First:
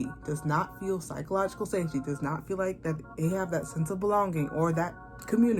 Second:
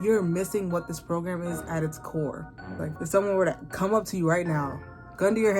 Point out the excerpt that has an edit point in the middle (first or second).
second